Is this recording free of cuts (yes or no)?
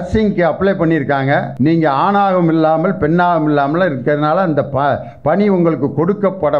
no